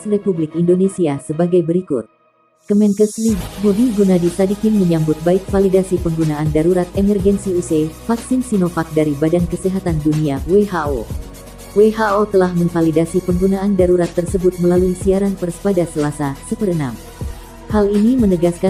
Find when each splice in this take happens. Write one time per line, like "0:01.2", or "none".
none

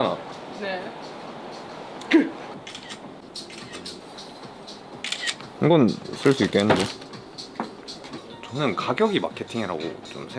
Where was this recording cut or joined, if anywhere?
0:02.5
0:05.5
0:08.1

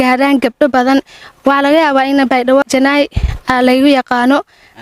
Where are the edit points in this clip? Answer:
0:02.6

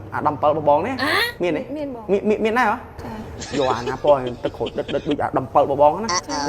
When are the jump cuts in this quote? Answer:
0:03.3

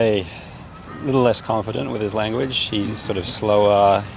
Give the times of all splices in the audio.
none

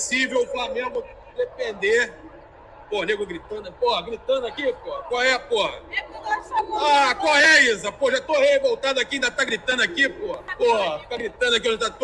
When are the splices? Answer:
0:10.5

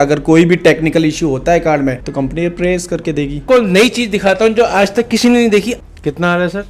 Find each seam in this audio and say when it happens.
0:03.4
0:05.8

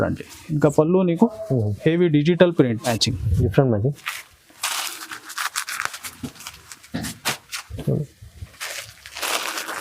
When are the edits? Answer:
0:02.9

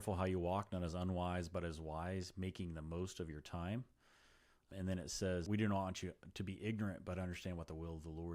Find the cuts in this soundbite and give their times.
0:04.7
0:05.4

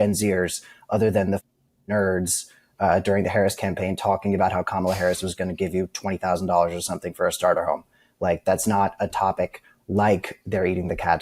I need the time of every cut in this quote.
none

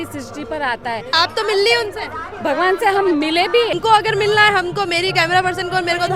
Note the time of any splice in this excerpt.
0:01.1
0:03.7

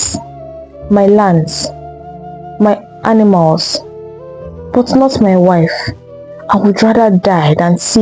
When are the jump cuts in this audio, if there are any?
none

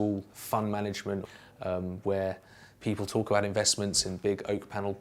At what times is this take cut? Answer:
0:01.3

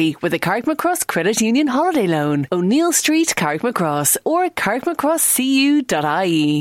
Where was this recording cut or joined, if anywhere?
none

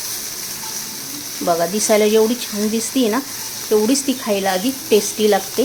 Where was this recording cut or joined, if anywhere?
none

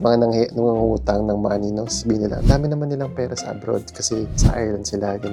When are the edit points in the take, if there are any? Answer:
none

